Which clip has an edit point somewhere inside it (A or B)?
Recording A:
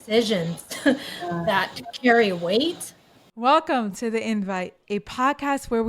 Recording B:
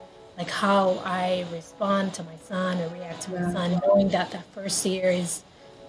A